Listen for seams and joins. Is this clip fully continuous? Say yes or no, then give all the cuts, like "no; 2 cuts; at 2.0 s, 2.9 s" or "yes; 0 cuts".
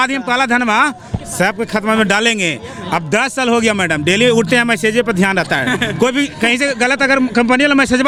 yes; 0 cuts